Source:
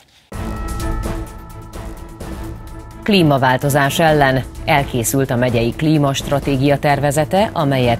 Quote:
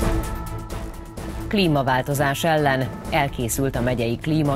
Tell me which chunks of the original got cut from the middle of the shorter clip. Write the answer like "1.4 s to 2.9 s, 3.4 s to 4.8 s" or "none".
2.5 s to 3.0 s

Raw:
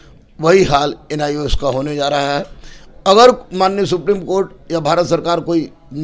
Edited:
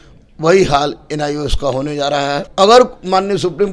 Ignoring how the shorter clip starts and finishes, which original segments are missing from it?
2.5 s to 3.0 s

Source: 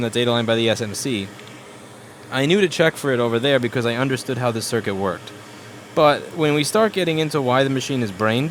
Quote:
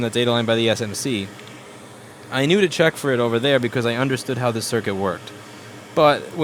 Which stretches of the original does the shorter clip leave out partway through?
none

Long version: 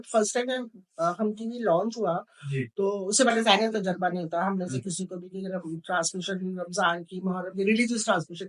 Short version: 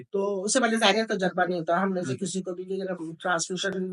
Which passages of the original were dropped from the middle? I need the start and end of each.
none

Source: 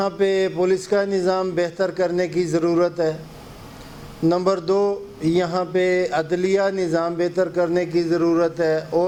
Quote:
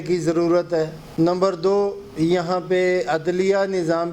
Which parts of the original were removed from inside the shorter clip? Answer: 3.3 s to 4.1 s

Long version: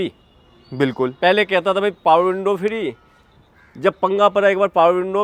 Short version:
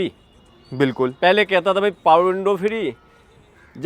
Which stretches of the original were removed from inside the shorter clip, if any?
none

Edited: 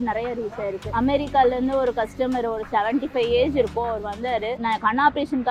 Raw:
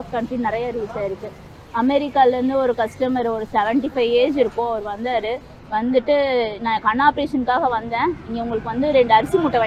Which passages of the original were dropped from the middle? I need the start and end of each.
1.2 s to 1.6 s, 5.4 s to 6.6 s

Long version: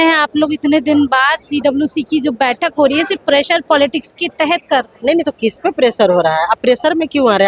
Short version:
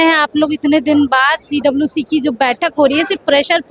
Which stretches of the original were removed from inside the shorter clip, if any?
none

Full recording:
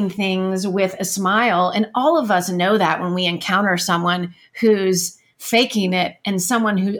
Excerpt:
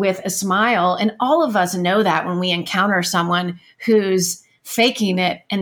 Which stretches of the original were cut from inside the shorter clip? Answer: none

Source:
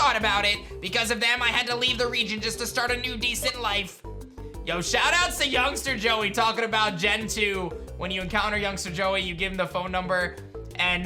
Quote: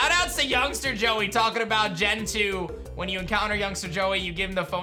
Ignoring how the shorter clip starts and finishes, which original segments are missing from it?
none

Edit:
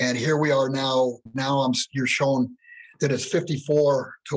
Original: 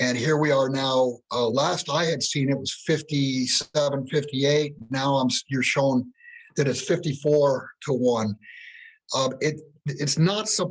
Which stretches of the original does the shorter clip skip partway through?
1.2 s to 4.8 s

